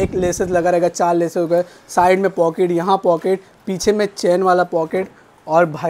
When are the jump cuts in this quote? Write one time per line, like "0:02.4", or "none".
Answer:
none